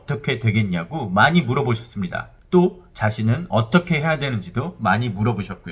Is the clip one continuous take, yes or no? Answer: yes